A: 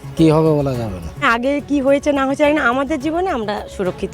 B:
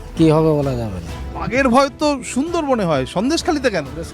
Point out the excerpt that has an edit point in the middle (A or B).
A